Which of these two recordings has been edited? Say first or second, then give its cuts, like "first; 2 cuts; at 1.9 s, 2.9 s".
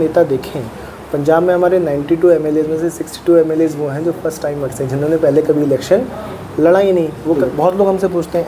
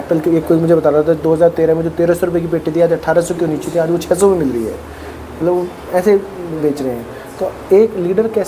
first; 1 cut; at 7.4 s